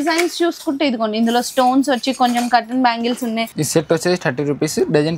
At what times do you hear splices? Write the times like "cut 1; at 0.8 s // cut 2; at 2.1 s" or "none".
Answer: cut 1; at 3.5 s